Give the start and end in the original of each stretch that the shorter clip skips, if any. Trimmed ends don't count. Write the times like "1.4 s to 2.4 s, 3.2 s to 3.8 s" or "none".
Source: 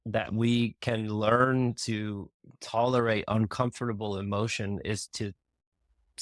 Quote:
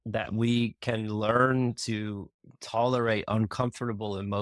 none